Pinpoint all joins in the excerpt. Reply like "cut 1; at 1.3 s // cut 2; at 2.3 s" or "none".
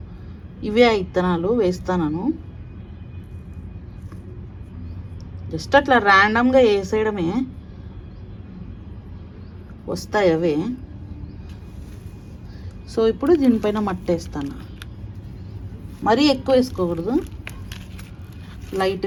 none

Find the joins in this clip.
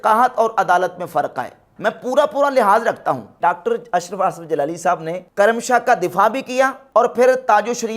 cut 1; at 1.7 s // cut 2; at 3.3 s // cut 3; at 6.8 s

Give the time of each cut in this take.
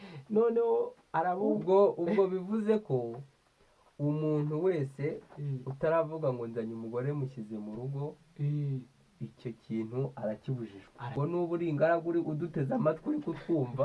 cut 1; at 11.1 s

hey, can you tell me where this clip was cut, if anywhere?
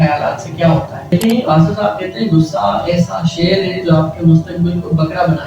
cut 1; at 1.1 s

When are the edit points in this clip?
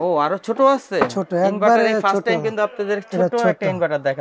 none

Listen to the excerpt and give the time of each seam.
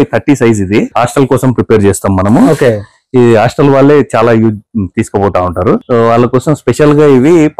cut 1; at 0.9 s // cut 2; at 5.8 s

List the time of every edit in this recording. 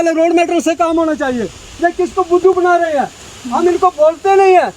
none

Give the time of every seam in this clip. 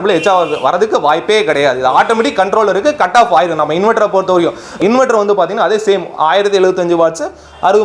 cut 1; at 4.7 s

